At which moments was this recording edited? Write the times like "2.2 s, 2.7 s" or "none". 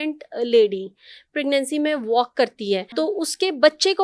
2.9 s